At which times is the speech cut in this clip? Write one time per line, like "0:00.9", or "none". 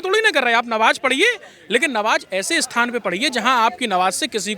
none

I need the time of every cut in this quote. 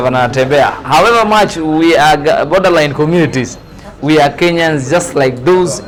none

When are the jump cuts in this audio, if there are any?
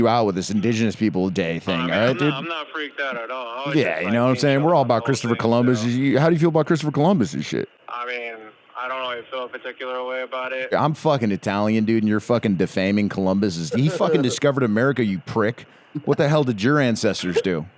0:07.8
0:10.7

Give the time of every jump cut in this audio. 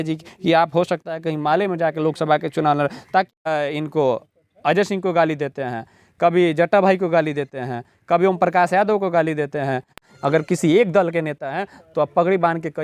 0:03.3
0:10.0

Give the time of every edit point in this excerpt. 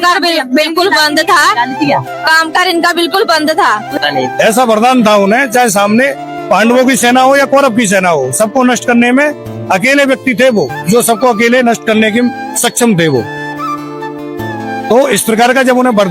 0:03.9

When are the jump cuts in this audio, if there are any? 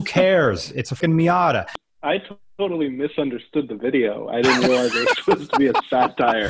0:00.9
0:01.8

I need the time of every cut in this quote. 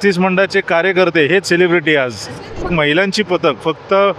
0:02.7

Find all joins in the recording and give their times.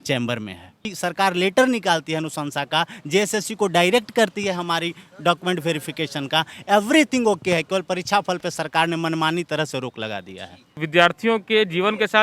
0:00.9
0:10.8

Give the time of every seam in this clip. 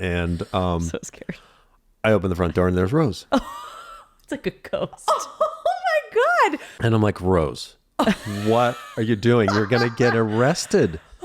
0:06.7

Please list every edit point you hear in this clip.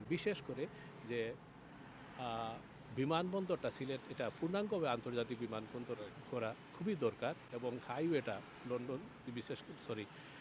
none

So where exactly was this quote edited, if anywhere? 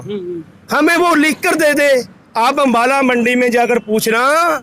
0:02.2

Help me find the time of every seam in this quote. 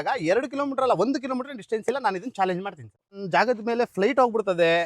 0:03.0

